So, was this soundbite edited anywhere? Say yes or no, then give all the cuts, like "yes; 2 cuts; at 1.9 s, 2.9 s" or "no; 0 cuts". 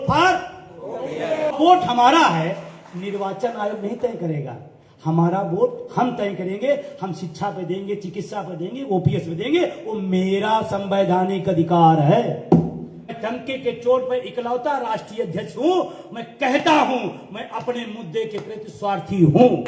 yes; 2 cuts; at 1.5 s, 13.1 s